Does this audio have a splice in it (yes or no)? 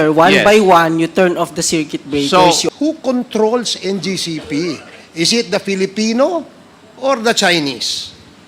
yes